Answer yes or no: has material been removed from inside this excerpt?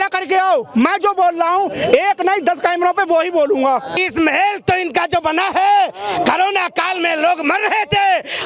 yes